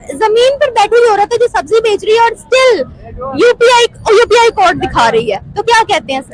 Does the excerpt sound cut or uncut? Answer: uncut